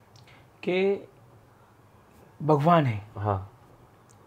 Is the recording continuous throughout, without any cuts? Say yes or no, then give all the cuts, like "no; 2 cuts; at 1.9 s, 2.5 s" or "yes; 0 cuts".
yes; 0 cuts